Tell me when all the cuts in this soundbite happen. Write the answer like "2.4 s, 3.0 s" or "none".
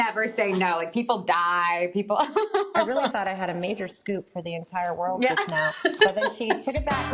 2.7 s

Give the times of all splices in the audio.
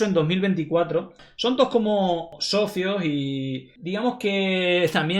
1.2 s, 2.3 s

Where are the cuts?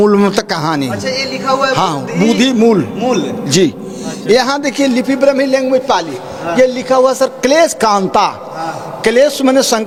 none

